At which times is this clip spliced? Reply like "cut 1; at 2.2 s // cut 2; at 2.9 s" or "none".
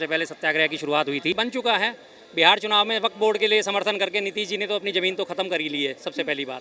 cut 1; at 1.4 s